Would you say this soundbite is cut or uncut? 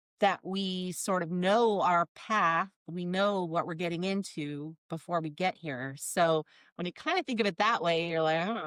uncut